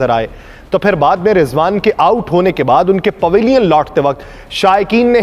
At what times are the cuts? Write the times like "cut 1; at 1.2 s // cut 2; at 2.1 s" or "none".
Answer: none